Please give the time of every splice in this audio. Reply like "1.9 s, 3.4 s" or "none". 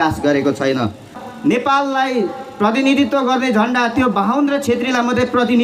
1.2 s